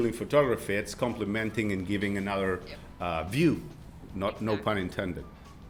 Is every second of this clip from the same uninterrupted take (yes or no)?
yes